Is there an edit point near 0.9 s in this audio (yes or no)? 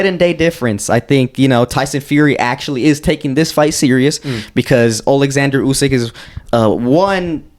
no